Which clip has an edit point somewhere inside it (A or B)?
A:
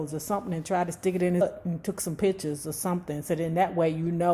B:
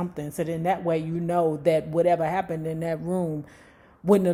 A